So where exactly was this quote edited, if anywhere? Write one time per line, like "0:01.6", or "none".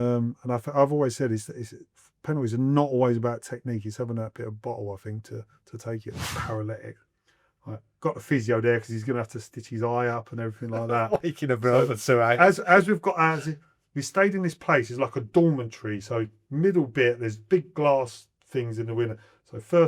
0:06.2